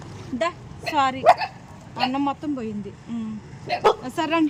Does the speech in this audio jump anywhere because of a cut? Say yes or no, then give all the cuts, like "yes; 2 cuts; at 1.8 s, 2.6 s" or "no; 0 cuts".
no; 0 cuts